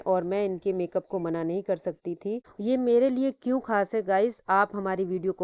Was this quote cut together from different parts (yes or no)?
yes